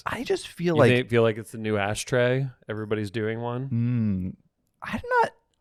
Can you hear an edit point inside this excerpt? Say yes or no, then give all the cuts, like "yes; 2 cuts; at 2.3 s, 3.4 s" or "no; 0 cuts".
no; 0 cuts